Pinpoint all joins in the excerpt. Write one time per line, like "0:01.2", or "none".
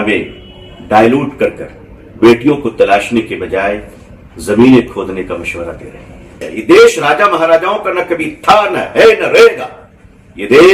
0:06.5